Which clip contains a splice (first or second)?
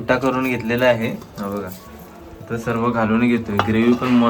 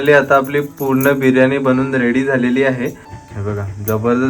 second